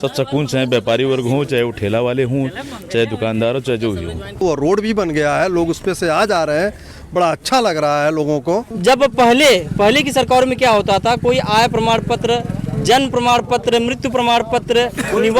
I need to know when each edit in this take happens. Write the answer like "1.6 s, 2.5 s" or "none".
4.4 s, 8.7 s